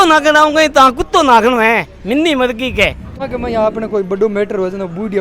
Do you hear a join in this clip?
yes; 1 cut; at 3.1 s

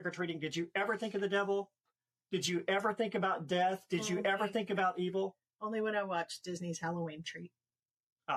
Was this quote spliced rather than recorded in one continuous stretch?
no; 0 cuts

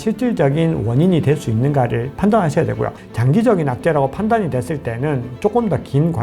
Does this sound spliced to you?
yes; 1 cut; at 3.0 s

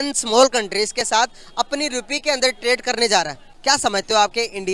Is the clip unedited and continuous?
no; 1 cut; at 3.5 s

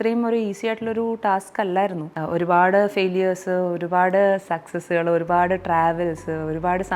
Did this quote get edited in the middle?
yes; 1 cut; at 2.1 s

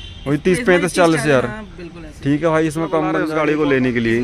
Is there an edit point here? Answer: yes; 1 cut; at 3.3 s

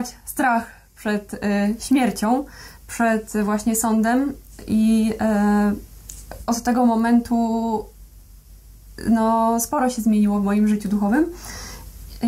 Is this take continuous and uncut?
yes; 0 cuts

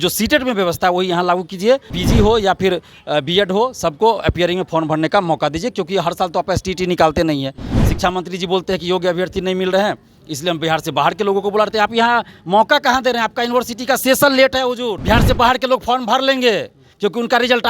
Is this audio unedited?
no; 2 cuts; at 2.0 s, 15.0 s

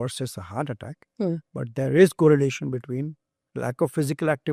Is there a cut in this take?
no; 0 cuts

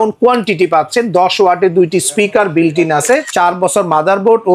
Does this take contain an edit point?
yes; 1 cut; at 3.3 s

